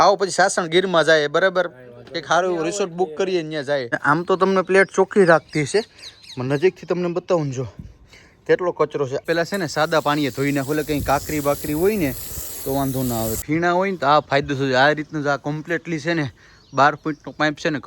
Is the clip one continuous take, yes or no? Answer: no